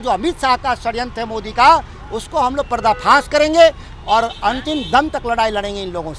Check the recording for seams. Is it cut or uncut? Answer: uncut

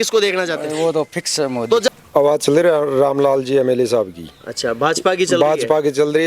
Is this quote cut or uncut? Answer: cut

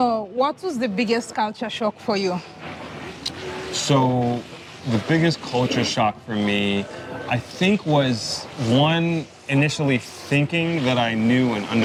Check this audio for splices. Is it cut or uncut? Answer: uncut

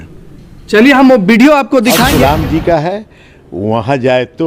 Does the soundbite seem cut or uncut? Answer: cut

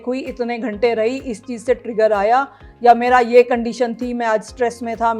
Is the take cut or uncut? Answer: uncut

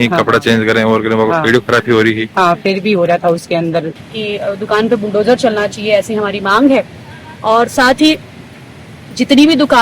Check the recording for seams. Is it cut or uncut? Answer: cut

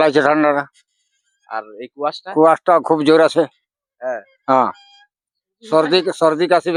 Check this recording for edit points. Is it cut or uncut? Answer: uncut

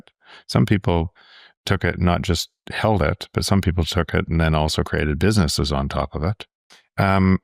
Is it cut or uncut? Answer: uncut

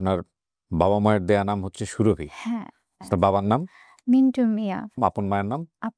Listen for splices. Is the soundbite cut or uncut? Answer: uncut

